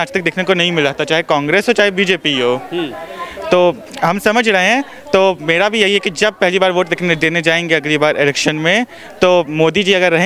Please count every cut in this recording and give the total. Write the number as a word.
zero